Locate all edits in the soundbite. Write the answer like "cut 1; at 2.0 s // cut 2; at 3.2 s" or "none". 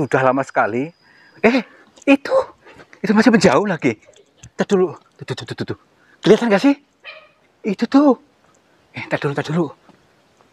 cut 1; at 1.3 s

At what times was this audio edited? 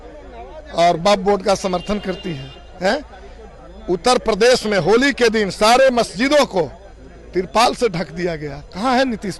none

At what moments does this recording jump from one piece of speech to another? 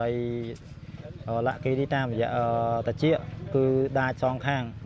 none

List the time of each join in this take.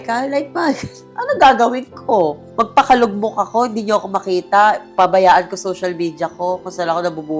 cut 1; at 1.1 s

